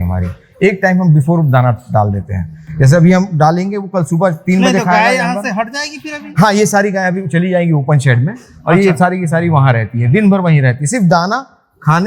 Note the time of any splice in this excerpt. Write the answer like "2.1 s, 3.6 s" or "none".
none